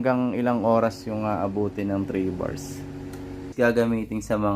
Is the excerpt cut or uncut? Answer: cut